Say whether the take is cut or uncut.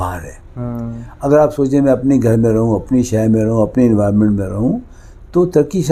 uncut